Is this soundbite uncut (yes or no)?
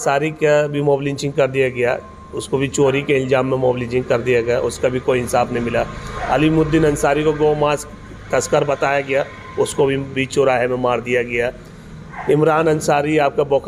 yes